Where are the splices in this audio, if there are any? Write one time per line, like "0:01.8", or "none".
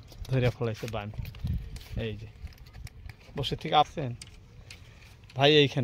0:03.9